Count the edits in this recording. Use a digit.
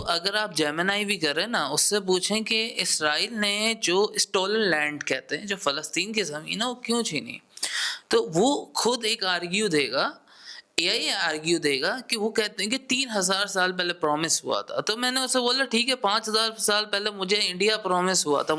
0